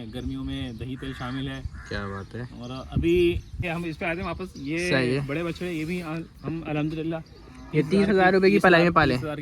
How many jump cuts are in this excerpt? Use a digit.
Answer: 1